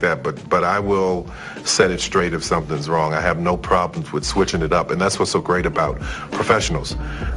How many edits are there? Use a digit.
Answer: 0